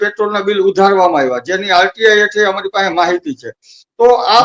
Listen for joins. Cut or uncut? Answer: uncut